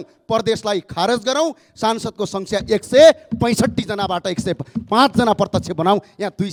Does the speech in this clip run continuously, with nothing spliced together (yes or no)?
yes